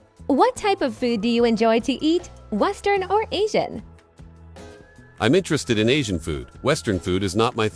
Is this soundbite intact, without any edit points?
yes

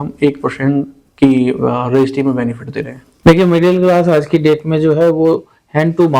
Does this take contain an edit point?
yes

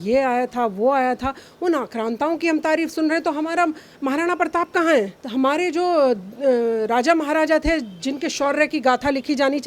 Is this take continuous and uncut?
yes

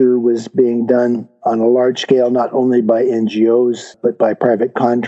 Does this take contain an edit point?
yes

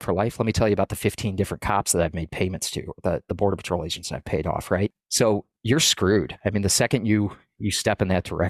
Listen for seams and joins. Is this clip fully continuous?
no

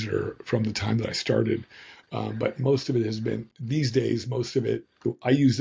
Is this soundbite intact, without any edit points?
yes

